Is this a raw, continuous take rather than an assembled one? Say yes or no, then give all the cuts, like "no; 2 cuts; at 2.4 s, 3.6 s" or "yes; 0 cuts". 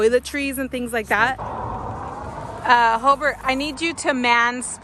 no; 1 cut; at 1.4 s